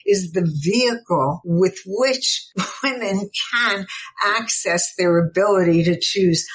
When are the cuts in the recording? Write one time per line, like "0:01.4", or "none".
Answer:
0:01.4
0:02.4